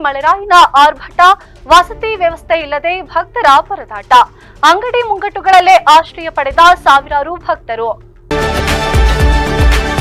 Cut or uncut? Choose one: cut